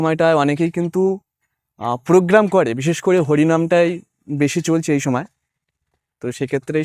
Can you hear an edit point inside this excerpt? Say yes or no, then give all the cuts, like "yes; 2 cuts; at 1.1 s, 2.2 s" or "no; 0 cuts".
no; 0 cuts